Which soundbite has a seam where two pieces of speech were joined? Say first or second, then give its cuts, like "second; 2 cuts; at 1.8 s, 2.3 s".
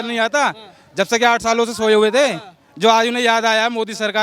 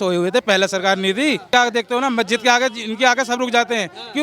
second; 1 cut; at 1.5 s